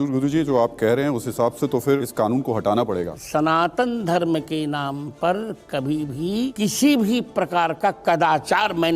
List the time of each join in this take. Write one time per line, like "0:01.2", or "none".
0:02.1
0:03.2
0:06.5